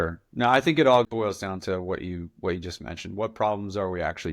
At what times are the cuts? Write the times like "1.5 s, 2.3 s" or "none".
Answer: 1.0 s